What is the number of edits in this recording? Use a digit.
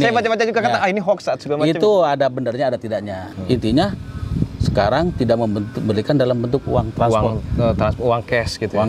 1